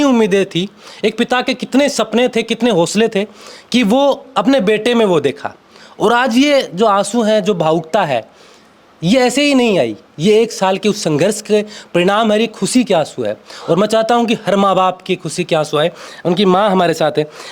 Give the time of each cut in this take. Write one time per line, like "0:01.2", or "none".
none